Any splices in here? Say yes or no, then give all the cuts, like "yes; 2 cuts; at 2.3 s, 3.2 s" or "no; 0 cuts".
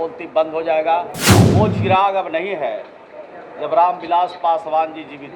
yes; 1 cut; at 1.2 s